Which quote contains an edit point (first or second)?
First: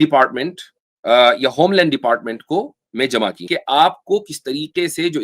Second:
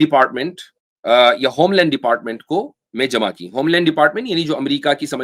first